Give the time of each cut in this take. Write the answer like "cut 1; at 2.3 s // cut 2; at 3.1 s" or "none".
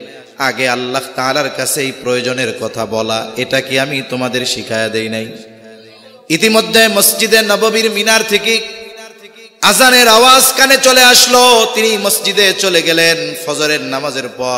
none